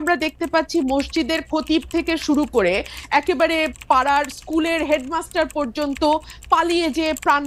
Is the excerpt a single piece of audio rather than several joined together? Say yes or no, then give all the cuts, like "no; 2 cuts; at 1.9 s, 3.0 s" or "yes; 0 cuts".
yes; 0 cuts